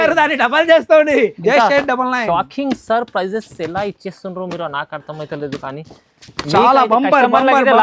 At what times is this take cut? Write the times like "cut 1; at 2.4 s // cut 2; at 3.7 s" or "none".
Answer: cut 1; at 1.4 s